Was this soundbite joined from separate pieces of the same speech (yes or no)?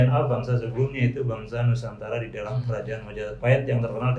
no